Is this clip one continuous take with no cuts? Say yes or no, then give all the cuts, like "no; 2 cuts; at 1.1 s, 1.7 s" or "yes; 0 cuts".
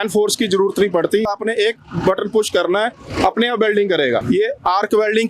no; 2 cuts; at 1.3 s, 4.2 s